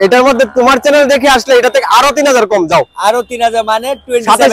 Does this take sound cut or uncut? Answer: uncut